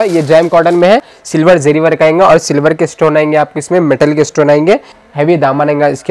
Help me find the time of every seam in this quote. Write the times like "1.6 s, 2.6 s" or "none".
1.1 s, 5.0 s